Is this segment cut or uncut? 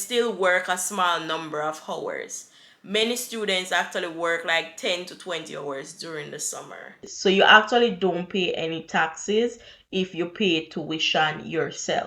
cut